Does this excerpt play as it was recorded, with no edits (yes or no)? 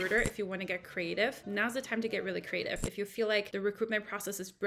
no